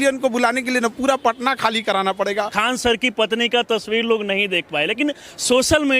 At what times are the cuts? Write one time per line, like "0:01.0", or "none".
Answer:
0:02.5